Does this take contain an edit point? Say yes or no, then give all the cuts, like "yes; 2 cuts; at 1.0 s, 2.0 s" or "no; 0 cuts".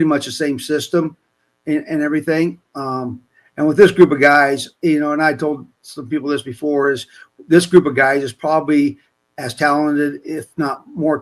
no; 0 cuts